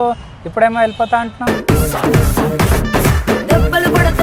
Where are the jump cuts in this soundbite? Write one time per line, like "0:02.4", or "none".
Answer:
none